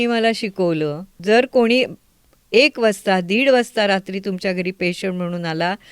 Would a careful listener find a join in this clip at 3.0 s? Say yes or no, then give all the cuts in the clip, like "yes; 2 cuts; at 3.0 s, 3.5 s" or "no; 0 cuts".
no; 1 cut; at 1.1 s